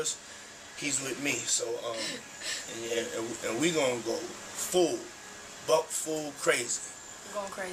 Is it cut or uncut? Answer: uncut